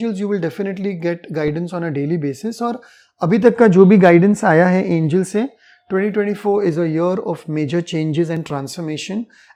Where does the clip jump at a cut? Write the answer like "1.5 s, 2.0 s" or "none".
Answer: none